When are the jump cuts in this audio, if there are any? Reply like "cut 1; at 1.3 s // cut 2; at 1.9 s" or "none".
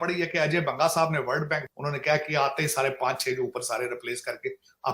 none